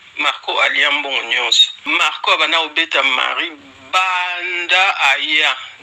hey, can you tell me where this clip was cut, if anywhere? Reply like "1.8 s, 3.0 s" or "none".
1.7 s

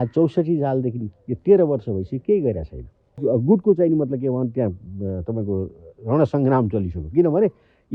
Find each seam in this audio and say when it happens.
3.1 s

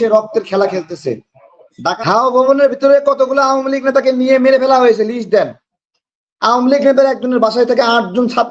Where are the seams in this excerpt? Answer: 2.0 s

